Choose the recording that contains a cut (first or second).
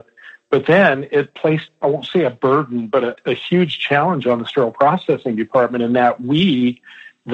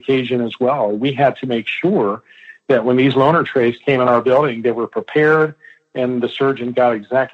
first